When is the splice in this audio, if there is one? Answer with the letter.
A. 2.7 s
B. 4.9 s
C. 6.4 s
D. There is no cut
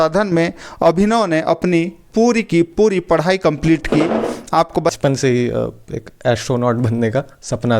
B